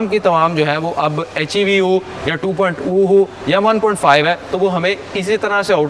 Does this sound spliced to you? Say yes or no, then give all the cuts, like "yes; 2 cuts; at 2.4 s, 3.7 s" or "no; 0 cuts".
no; 0 cuts